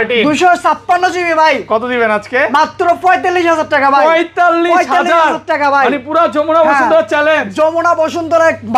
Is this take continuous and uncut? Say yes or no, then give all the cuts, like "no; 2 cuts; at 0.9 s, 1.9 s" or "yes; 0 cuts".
yes; 0 cuts